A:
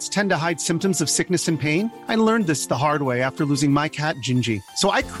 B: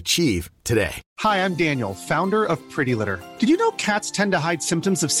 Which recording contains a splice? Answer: B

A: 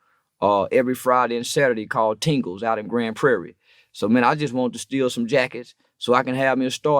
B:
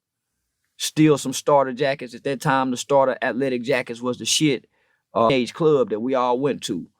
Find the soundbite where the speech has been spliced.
B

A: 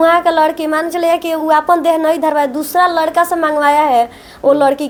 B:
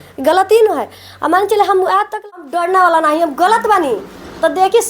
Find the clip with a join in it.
B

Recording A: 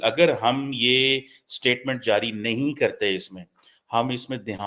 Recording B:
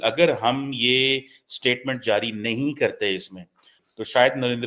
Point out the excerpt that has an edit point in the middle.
B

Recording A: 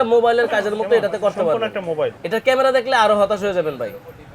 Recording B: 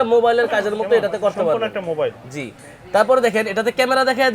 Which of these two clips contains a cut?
A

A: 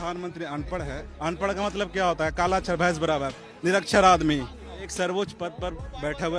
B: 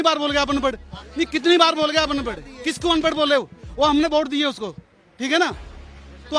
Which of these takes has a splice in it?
A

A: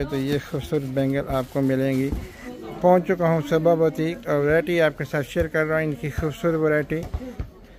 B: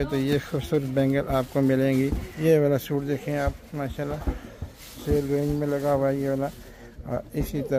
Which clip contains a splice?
B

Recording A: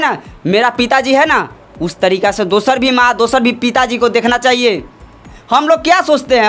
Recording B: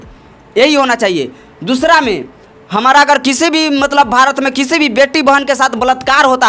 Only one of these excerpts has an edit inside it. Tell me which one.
A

